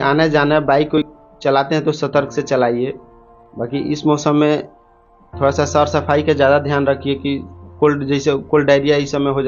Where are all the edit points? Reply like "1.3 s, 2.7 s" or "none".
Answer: 1.0 s